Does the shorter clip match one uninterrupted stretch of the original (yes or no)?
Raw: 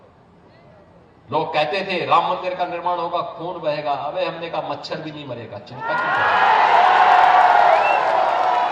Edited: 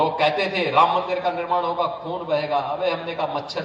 yes